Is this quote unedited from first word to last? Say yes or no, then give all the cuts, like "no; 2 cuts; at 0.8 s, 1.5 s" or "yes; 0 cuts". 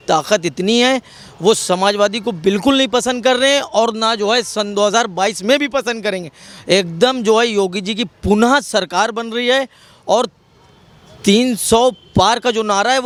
yes; 0 cuts